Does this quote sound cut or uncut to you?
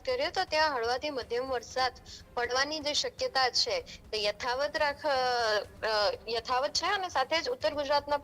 uncut